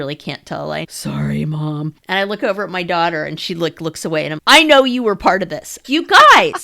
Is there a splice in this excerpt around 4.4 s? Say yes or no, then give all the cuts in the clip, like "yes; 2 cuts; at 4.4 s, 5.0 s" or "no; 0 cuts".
yes; 4 cuts; at 0.9 s, 2.0 s, 4.4 s, 5.7 s